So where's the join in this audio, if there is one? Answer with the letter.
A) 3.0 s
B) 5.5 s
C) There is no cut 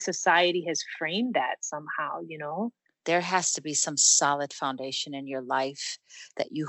A